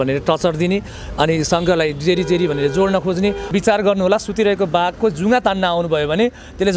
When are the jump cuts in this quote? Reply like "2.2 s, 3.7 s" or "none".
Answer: 3.5 s